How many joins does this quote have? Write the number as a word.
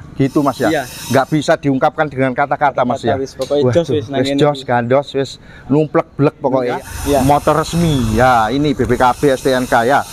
one